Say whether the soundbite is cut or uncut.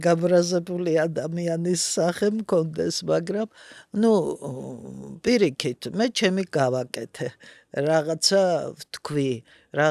uncut